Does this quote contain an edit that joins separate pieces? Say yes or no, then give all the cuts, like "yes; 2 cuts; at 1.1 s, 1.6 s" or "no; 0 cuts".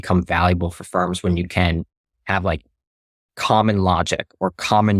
no; 0 cuts